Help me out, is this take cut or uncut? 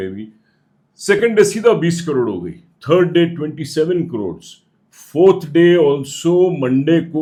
uncut